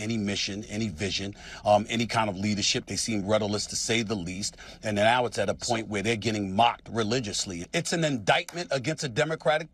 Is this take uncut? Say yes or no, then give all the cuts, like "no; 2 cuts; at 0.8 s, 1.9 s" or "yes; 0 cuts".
no; 1 cut; at 7.6 s